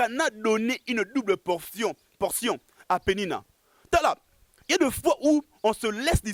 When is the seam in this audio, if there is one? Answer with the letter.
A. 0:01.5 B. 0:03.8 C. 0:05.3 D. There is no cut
D